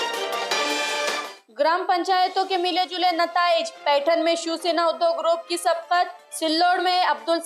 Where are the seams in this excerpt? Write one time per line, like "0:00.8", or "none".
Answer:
none